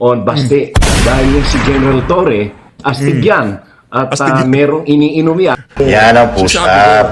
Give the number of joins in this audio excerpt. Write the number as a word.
one